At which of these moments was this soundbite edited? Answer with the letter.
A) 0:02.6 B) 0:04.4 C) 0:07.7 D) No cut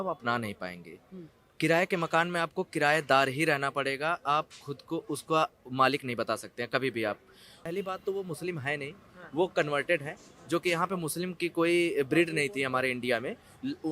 C